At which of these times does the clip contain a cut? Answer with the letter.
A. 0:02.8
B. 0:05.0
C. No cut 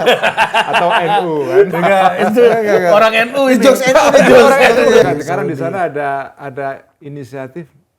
B